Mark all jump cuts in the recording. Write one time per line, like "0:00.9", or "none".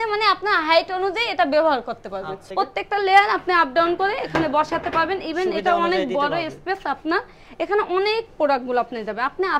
0:02.4

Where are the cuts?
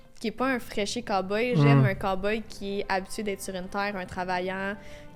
none

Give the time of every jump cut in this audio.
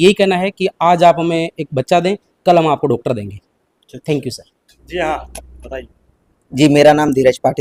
none

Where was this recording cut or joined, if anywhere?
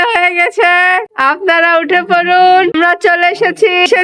0:01.1
0:02.7

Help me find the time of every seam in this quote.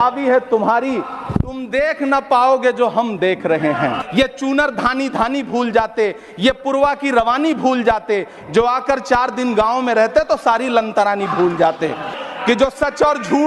0:04.0
0:12.1

